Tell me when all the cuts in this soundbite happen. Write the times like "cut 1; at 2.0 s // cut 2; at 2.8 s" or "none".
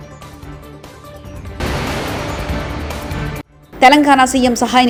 none